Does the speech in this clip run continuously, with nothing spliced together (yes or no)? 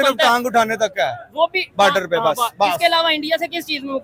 yes